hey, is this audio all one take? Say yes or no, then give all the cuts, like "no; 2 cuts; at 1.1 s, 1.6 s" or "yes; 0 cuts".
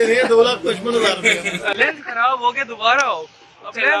no; 1 cut; at 1.7 s